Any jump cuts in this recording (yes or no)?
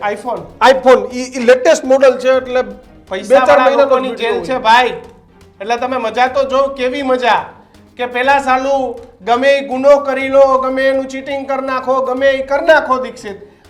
no